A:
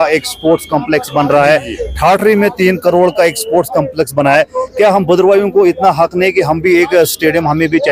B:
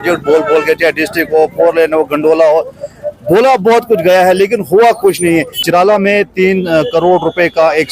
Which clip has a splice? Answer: B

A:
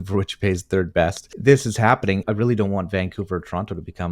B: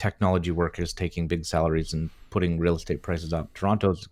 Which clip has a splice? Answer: A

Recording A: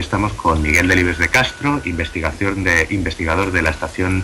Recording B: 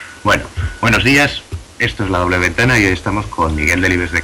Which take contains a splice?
A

